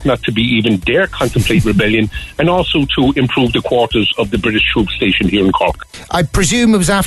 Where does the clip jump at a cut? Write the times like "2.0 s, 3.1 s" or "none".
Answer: 5.8 s

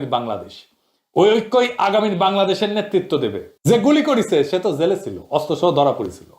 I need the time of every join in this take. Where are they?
3.5 s

